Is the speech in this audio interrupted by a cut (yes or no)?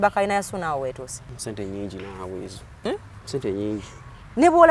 yes